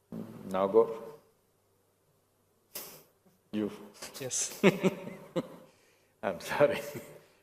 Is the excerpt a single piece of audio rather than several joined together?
no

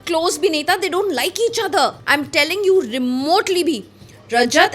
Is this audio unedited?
no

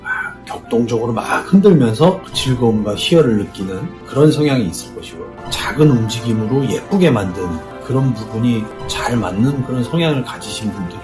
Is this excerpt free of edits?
yes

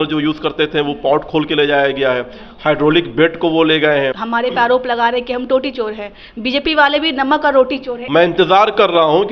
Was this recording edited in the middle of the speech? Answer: yes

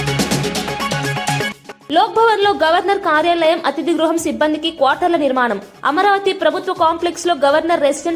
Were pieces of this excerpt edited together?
no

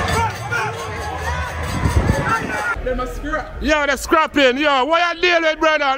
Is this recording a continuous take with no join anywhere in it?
no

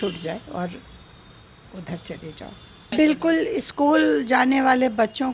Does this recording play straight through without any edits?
no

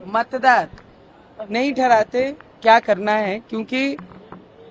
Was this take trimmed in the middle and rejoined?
no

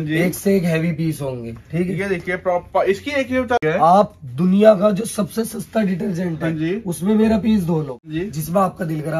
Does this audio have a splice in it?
yes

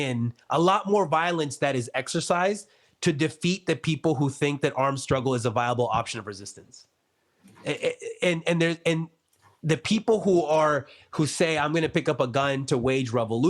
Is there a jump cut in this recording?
no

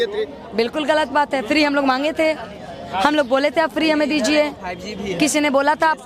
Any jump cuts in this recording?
no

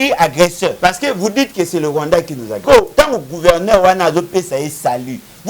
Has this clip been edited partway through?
yes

